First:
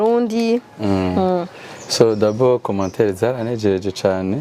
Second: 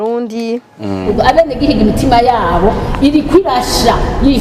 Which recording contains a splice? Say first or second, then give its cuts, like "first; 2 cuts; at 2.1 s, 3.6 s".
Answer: second; 1 cut; at 1.1 s